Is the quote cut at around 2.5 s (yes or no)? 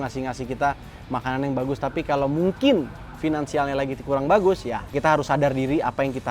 no